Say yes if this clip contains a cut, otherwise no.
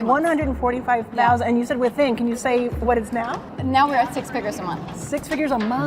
yes